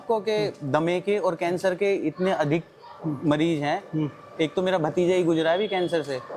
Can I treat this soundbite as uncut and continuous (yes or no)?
yes